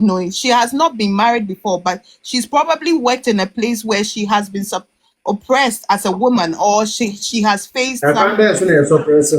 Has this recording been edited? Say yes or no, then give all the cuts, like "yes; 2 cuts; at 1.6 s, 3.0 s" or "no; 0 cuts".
no; 0 cuts